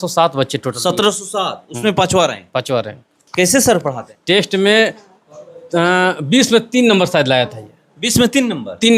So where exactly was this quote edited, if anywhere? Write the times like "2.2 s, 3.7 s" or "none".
4.1 s